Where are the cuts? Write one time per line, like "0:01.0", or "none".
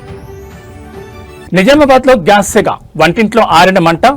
0:01.3